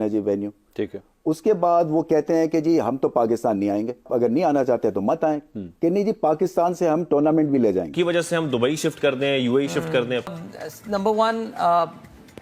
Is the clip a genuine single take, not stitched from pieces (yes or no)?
no